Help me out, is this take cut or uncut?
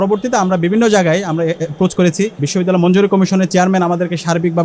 cut